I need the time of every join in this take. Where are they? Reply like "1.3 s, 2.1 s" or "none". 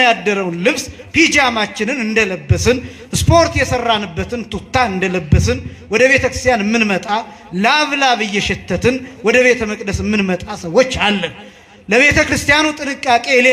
none